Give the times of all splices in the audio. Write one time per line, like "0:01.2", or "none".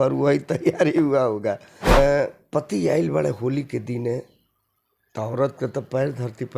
0:02.0